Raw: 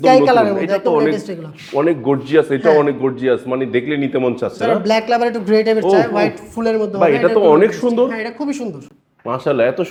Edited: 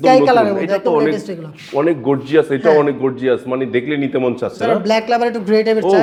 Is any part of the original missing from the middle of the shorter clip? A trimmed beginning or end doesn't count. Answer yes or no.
no